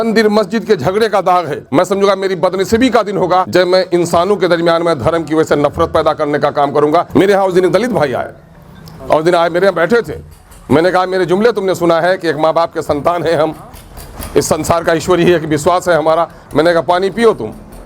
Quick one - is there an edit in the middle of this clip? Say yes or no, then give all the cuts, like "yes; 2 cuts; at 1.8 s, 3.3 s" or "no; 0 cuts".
yes; 3 cuts; at 1.6 s, 3.5 s, 7.1 s